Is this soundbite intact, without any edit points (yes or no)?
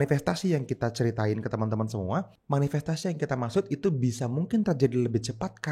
no